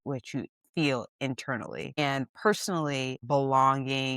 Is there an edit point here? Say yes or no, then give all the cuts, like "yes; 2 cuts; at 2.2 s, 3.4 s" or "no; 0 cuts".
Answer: yes; 2 cuts; at 2.0 s, 3.2 s